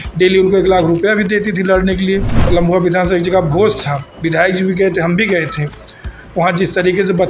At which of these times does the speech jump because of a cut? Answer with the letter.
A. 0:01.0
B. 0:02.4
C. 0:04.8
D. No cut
B